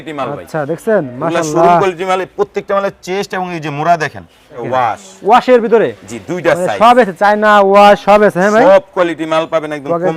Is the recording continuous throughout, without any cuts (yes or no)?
no